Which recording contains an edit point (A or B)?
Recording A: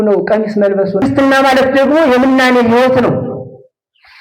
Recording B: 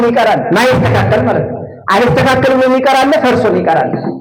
A